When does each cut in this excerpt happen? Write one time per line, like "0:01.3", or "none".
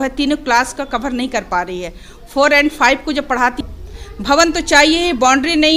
0:03.6